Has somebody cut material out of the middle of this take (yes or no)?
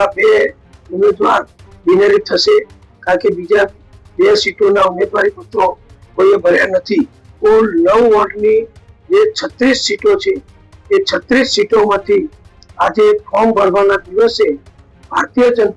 yes